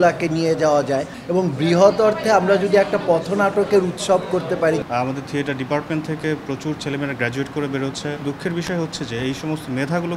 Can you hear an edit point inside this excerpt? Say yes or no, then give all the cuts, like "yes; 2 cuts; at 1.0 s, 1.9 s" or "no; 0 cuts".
yes; 3 cuts; at 1.1 s, 4.8 s, 8.2 s